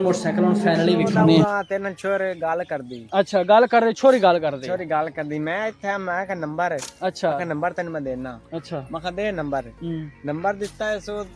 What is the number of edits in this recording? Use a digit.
1